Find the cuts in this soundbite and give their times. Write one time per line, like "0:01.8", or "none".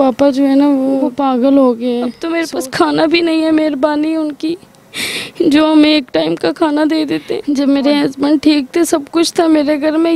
0:01.1
0:02.2
0:07.3